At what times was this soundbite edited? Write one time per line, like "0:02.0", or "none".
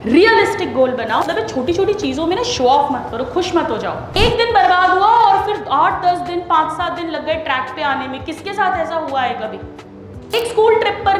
0:01.2
0:04.1
0:10.3